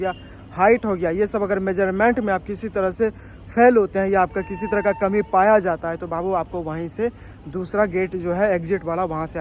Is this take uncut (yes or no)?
yes